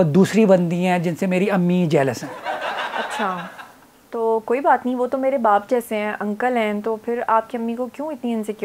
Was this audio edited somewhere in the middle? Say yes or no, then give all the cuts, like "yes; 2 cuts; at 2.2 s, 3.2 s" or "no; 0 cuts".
no; 0 cuts